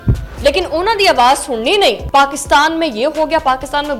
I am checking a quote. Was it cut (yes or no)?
yes